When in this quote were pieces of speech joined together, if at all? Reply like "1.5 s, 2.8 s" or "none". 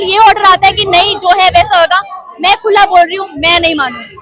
none

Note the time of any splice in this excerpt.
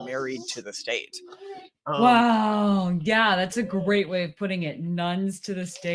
none

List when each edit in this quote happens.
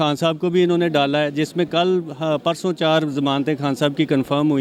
none

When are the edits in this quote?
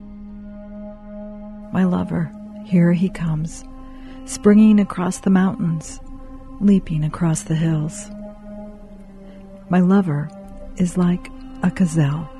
1.0 s

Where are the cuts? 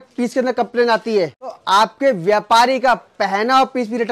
1.6 s

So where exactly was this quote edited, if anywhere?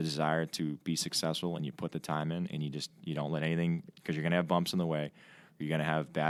none

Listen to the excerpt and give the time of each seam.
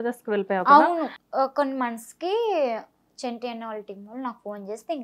1.2 s

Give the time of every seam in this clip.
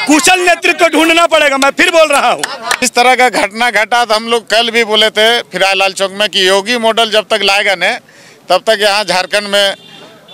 2.8 s

